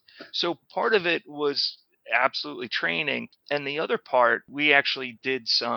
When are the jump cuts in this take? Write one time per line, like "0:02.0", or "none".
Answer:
0:03.3
0:04.5